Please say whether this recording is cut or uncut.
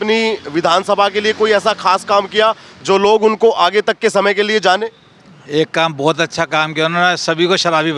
uncut